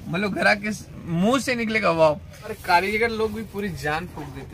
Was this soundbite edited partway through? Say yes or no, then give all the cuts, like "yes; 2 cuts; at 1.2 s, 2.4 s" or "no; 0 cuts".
yes; 1 cut; at 2.5 s